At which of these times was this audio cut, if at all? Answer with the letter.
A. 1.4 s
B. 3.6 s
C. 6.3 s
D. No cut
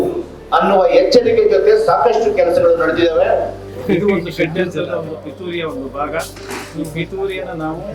B